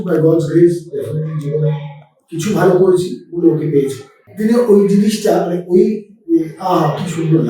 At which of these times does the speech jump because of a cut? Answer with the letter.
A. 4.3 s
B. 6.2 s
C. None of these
A